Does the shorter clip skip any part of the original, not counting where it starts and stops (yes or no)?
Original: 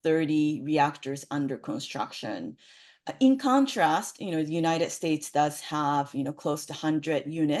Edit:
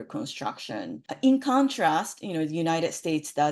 yes